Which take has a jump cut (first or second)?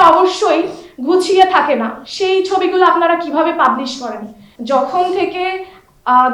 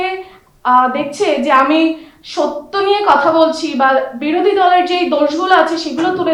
first